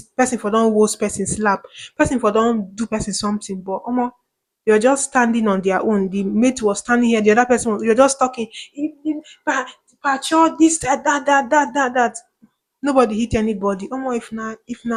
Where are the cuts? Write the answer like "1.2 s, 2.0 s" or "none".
none